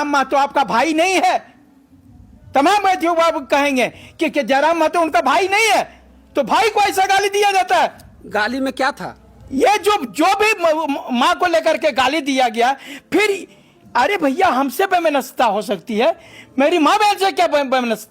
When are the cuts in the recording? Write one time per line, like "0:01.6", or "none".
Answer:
none